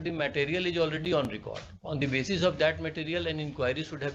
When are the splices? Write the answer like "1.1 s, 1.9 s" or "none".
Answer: none